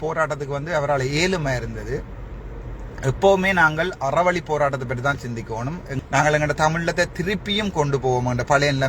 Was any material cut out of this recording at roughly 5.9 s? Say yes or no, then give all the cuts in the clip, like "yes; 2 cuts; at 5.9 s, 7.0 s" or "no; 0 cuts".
yes; 1 cut; at 5.9 s